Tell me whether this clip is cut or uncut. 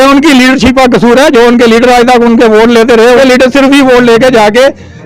cut